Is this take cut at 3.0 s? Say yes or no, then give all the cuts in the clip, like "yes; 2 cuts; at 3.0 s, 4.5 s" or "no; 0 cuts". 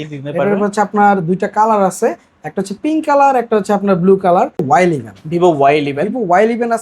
no; 1 cut; at 4.6 s